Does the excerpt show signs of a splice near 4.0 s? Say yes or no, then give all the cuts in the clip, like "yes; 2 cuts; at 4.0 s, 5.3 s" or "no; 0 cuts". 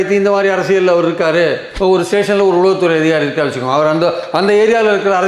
no; 1 cut; at 1.7 s